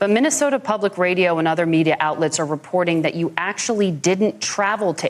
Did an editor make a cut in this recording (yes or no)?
no